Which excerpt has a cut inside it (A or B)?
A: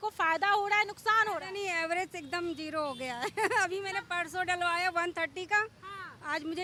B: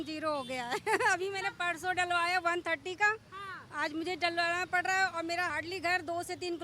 B